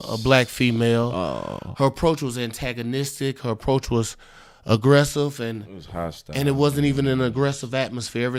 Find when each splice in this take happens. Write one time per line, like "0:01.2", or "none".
none